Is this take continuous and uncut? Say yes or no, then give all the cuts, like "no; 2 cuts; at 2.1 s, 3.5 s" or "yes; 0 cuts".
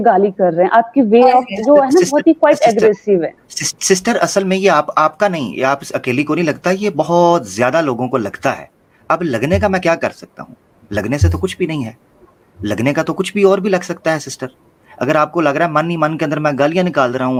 yes; 0 cuts